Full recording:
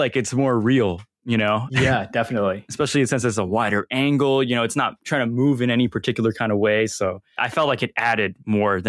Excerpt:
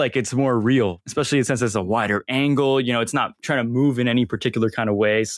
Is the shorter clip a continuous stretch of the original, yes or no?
no